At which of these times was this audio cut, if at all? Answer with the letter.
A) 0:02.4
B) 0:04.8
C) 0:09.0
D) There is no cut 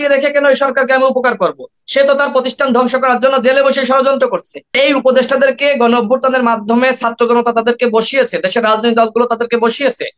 B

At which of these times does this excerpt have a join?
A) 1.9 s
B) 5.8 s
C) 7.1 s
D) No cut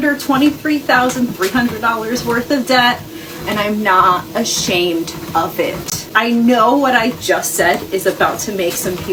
D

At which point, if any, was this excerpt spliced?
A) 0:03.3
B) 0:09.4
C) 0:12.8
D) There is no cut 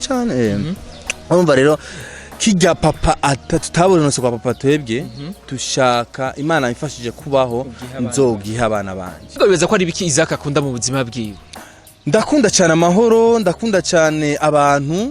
B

